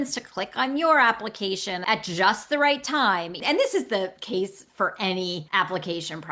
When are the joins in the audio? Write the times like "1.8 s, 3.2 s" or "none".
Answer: 1.7 s, 3.4 s, 5.4 s